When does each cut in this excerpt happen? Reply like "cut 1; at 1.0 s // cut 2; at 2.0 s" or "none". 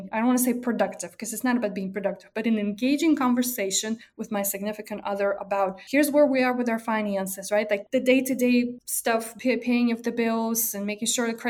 cut 1; at 4.1 s // cut 2; at 5.8 s // cut 3; at 7.8 s // cut 4; at 9.0 s